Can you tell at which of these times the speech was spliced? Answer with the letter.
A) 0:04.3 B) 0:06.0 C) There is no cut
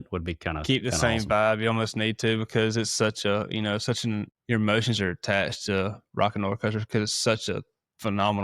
A